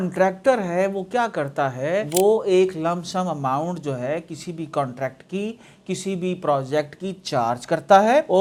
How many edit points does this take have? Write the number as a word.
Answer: zero